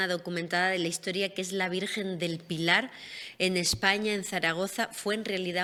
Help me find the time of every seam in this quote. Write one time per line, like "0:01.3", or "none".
none